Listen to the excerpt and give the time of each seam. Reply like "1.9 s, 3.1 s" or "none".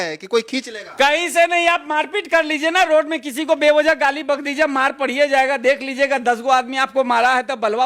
none